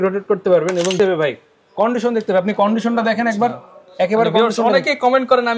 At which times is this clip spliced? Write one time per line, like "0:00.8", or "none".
0:00.9